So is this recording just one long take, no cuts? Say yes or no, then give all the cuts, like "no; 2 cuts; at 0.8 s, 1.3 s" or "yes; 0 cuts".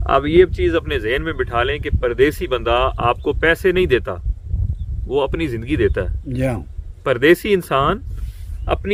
yes; 0 cuts